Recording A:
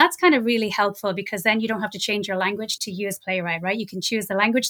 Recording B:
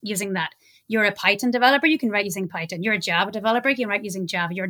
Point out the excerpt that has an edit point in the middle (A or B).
A